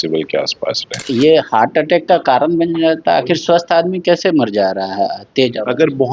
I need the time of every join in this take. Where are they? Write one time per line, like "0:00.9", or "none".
0:01.1